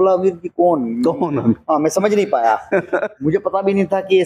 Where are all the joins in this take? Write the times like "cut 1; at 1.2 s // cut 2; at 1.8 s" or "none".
cut 1; at 3.1 s